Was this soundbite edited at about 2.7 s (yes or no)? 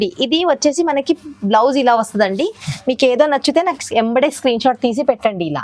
yes